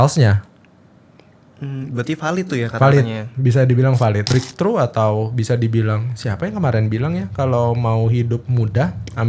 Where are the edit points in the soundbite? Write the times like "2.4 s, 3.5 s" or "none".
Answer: 4.3 s